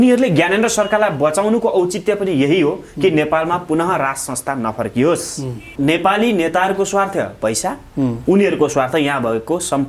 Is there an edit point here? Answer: yes; 1 cut; at 5.6 s

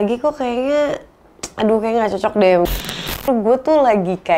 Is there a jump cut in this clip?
yes; 1 cut; at 2.7 s

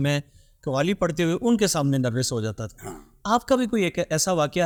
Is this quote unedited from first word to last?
yes; 0 cuts

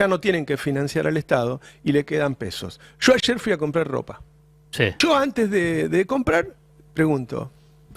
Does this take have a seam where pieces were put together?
yes; 1 cut; at 4.9 s

